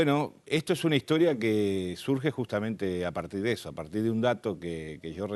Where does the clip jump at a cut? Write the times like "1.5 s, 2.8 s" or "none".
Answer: 1.3 s